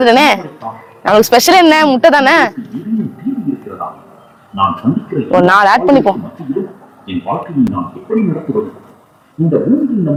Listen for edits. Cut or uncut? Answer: uncut